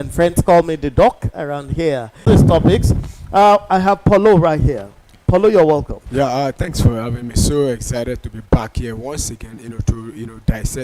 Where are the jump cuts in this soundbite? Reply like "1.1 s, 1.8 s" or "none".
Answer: 2.2 s